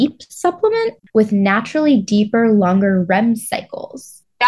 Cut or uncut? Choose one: cut